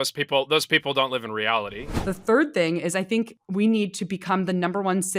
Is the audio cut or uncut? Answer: cut